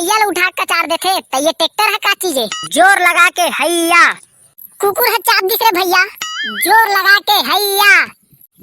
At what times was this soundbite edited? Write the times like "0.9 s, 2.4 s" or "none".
2.5 s